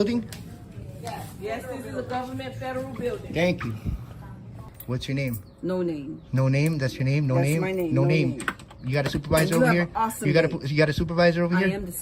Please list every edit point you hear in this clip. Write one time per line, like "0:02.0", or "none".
0:04.7

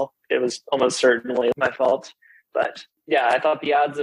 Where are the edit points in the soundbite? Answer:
none

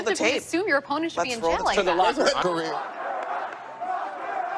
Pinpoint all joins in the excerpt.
0:02.4

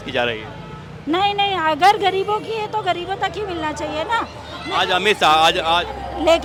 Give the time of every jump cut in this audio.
none

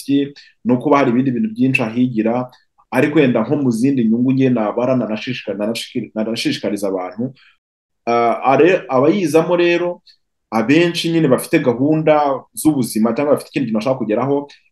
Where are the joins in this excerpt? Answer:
0:07.6

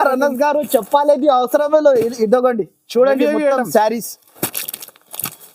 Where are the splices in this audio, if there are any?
none

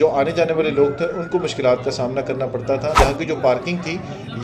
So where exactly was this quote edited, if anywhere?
0:02.9

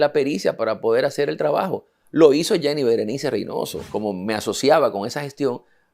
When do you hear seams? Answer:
0:03.8

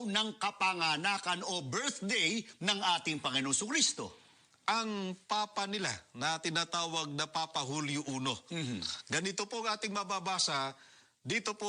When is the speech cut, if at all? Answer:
0:03.9

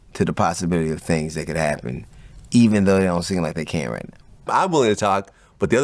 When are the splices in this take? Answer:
0:04.5

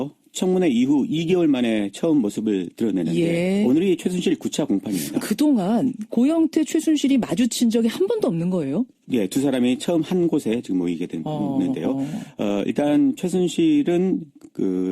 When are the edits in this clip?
0:06.7

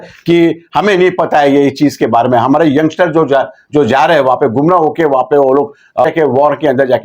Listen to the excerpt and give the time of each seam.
0:06.0

